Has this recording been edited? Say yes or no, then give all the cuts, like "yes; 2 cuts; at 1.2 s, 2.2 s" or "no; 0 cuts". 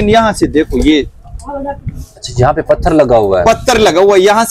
no; 0 cuts